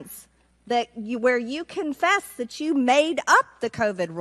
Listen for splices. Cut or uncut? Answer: uncut